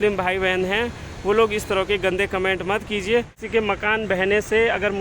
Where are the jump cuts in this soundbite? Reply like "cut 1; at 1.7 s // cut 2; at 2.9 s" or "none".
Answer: cut 1; at 3.4 s